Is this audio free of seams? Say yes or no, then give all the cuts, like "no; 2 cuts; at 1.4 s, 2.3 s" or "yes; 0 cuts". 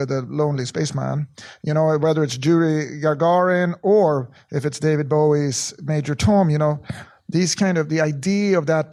yes; 0 cuts